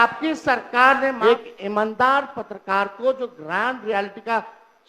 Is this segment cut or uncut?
cut